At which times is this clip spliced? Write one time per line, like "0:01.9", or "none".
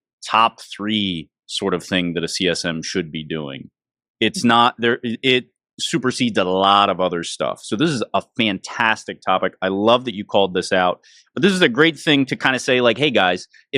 none